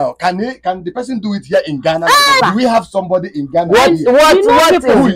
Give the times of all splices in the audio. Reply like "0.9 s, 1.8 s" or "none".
2.4 s